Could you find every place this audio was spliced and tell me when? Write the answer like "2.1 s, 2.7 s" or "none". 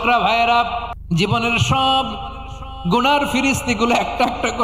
0.9 s